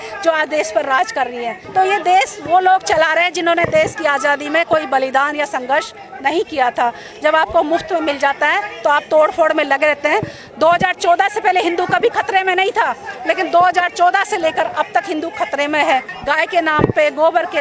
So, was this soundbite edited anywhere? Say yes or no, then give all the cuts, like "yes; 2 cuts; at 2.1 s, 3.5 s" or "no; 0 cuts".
yes; 2 cuts; at 1.5 s, 16.1 s